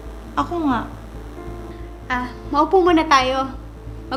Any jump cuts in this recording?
no; 0 cuts

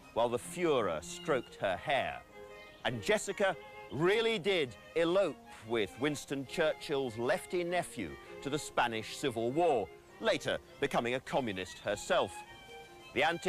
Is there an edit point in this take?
yes; 1 cut; at 5.3 s

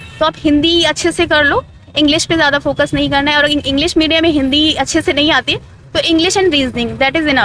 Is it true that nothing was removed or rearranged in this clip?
yes; 0 cuts

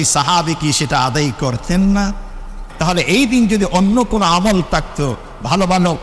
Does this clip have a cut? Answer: yes; 1 cut; at 2.7 s

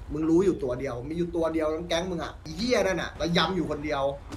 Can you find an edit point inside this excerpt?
yes; 2 cuts; at 2.5 s, 3.1 s

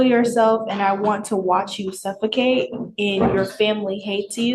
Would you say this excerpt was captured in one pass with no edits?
yes; 0 cuts

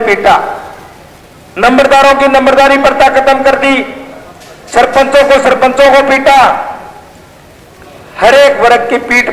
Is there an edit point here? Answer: no; 0 cuts

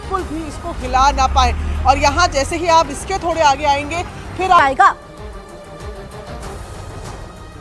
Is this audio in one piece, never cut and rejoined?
no; 1 cut; at 4.6 s

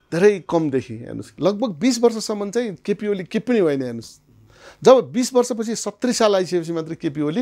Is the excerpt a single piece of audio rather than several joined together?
no; 1 cut; at 1.3 s

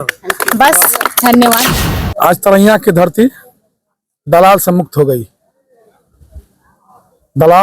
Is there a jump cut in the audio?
yes; 1 cut; at 1.7 s

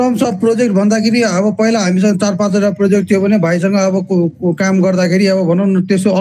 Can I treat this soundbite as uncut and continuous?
yes; 0 cuts

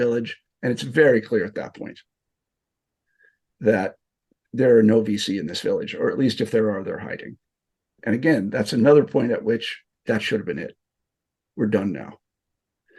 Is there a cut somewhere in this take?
yes; 1 cut; at 9.9 s

